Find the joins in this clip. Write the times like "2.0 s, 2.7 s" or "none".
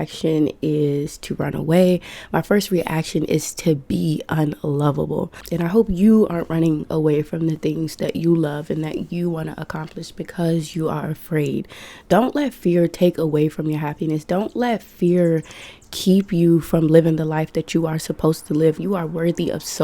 5.4 s